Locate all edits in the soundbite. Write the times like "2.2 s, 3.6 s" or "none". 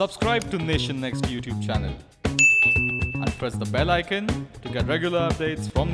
none